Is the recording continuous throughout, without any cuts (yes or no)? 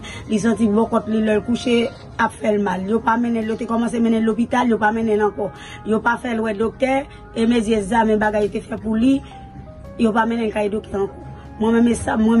yes